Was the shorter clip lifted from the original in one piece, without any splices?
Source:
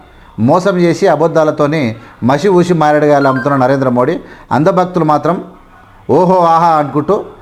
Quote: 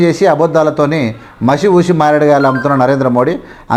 yes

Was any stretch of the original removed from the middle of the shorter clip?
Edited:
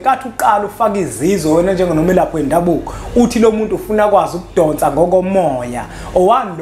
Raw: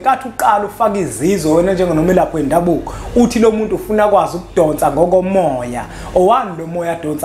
no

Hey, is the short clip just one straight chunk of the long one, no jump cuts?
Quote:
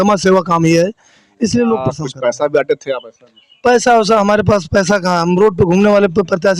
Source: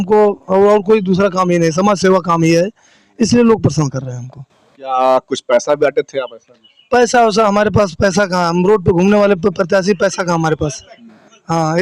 no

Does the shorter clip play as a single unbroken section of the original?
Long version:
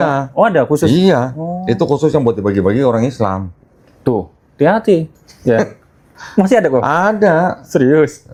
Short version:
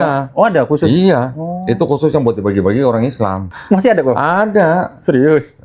no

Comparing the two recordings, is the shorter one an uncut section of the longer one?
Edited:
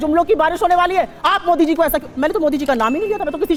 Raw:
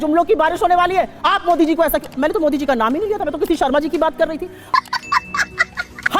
yes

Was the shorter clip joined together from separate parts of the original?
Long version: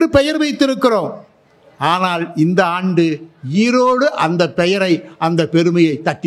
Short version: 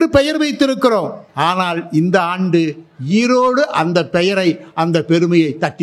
yes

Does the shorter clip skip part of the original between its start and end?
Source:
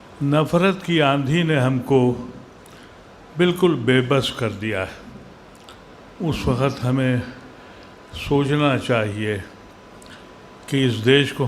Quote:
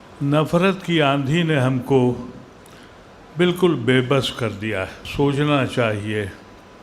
yes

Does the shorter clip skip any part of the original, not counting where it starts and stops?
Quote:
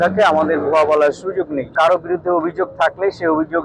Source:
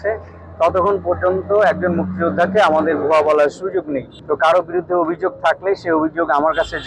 yes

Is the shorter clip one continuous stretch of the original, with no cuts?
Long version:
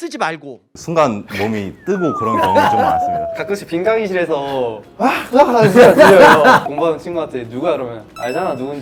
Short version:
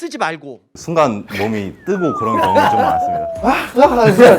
no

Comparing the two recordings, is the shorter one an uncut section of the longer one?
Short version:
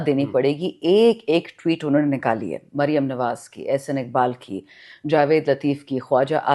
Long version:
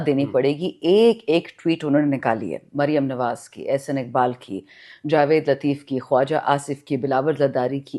yes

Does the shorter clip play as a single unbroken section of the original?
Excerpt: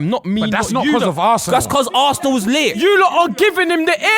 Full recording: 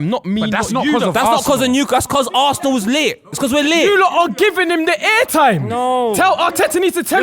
no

